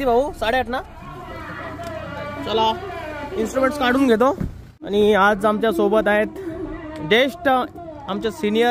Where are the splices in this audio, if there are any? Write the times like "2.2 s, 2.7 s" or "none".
4.7 s